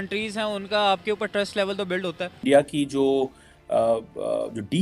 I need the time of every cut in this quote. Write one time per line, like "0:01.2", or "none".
0:02.4